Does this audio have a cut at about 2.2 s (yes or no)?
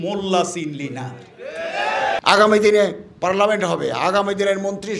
yes